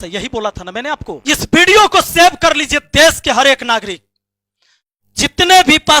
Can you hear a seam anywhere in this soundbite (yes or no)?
yes